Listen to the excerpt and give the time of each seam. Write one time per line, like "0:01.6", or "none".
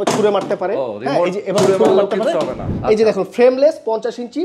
0:02.7